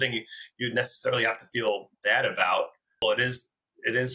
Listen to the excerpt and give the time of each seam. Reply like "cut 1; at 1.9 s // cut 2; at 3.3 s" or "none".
cut 1; at 3.0 s